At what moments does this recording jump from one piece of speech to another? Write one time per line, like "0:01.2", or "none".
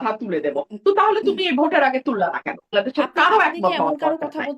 0:02.7